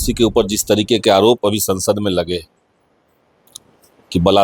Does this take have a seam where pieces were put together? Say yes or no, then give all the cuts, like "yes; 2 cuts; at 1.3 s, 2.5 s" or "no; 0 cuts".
no; 0 cuts